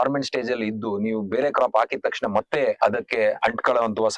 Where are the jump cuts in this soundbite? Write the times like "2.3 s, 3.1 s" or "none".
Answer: 3.1 s